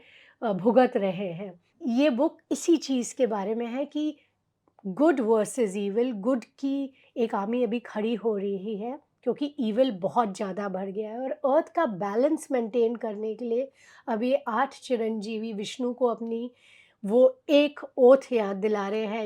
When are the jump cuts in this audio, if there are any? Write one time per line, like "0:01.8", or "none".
0:01.7

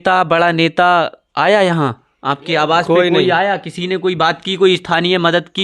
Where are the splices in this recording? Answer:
none

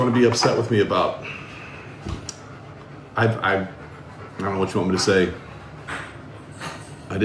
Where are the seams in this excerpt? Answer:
none

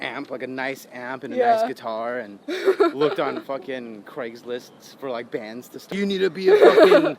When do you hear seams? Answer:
0:05.9

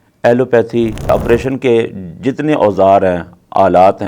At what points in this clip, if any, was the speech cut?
0:01.1

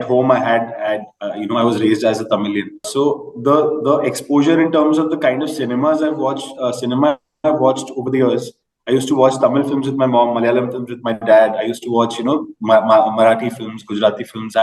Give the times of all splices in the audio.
none

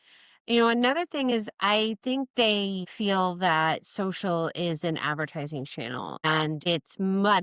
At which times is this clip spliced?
0:02.8
0:06.3

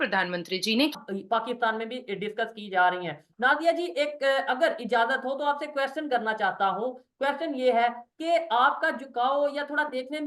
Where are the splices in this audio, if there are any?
0:00.9

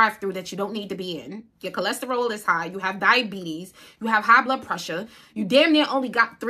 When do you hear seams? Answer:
none

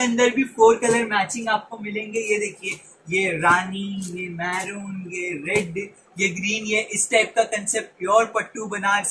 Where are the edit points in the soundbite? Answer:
none

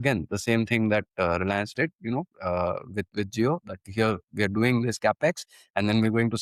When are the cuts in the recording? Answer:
none

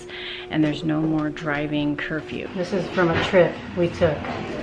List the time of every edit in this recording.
0:02.5

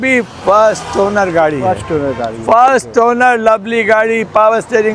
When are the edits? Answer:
none

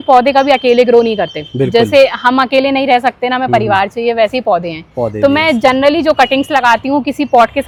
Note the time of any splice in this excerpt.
none

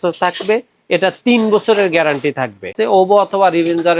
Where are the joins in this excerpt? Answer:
0:02.8

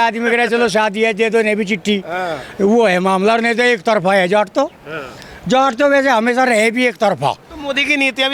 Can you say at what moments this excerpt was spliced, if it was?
none

